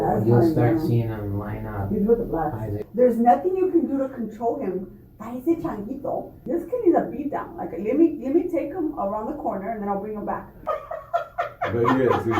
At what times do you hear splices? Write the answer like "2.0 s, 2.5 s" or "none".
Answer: 2.8 s, 6.3 s, 10.6 s